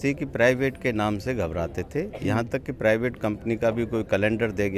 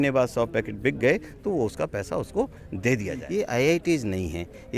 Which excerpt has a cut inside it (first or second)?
second